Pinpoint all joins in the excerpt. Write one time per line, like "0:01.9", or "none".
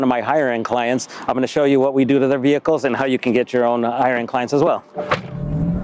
none